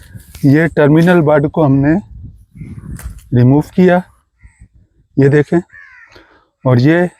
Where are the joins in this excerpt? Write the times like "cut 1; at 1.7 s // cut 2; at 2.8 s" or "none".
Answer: none

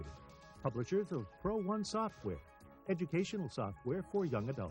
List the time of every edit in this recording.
none

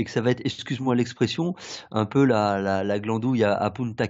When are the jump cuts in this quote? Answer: none

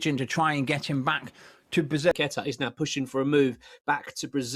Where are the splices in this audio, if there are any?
cut 1; at 2.1 s

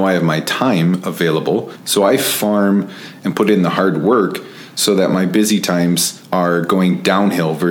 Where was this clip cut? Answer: cut 1; at 1.8 s // cut 2; at 6.1 s

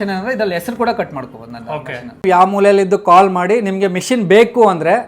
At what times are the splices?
cut 1; at 2.2 s

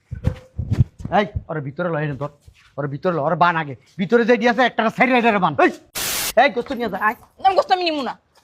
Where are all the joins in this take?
cut 1; at 6.2 s

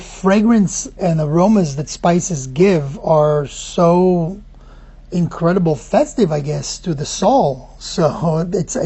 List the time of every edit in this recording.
cut 1; at 0.9 s

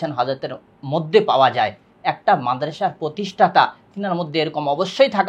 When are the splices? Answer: none

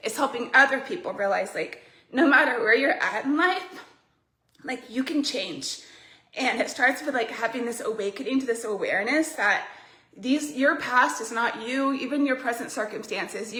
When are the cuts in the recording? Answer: none

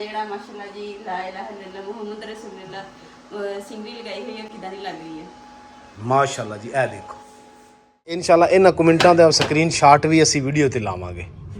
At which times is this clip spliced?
cut 1; at 8.2 s

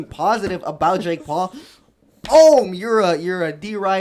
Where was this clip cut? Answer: none

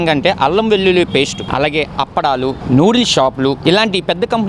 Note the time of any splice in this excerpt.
cut 1; at 1.4 s // cut 2; at 2.6 s

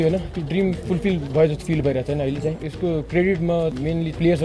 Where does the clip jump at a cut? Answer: none

